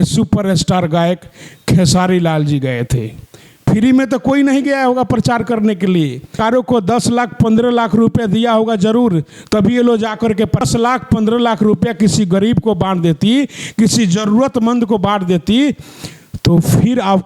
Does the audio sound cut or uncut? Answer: cut